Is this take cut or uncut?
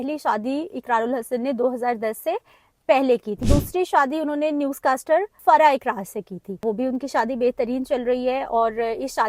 cut